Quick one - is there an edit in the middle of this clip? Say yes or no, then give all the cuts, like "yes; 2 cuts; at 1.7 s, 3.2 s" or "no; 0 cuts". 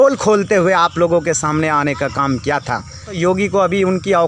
yes; 1 cut; at 3.2 s